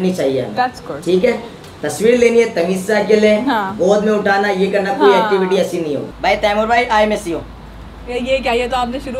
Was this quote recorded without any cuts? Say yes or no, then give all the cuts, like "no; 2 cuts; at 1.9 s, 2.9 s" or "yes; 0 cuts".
no; 1 cut; at 6.1 s